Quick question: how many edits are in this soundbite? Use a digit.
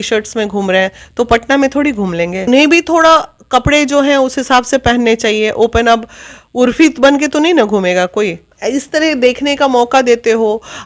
2